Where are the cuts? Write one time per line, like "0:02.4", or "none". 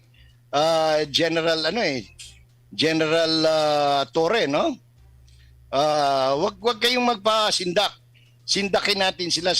none